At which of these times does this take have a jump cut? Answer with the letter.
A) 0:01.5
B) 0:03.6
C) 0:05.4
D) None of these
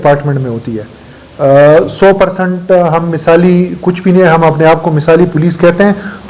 D